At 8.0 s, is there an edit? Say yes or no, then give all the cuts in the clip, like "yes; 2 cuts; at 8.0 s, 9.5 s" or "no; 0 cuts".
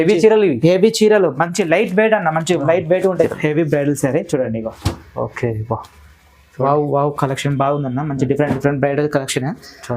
no; 1 cut; at 3.3 s